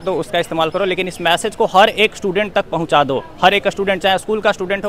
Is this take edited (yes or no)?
no